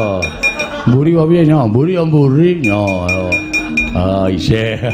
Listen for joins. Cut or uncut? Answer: uncut